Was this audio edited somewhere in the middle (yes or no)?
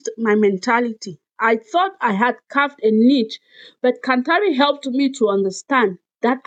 no